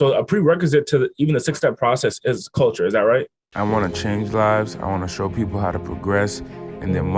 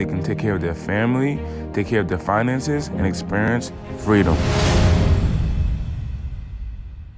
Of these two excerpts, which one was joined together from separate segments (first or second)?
first